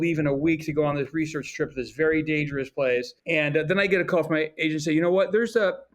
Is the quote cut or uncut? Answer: cut